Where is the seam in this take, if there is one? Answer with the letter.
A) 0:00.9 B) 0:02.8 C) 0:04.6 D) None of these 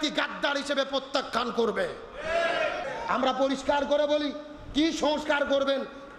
B